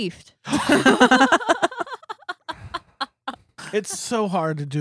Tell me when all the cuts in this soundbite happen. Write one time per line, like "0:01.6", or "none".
0:03.5